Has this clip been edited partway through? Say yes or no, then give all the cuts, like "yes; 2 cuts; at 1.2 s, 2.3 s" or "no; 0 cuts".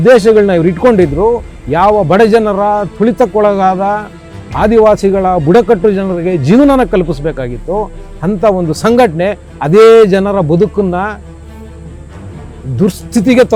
no; 0 cuts